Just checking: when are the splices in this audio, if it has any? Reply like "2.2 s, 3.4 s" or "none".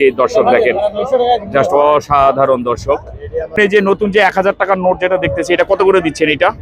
3.6 s